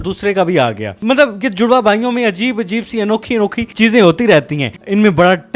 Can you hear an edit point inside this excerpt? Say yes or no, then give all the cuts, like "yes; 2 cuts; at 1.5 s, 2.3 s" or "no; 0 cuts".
yes; 1 cut; at 4.6 s